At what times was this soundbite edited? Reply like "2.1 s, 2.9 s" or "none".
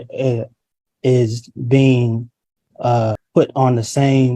3.2 s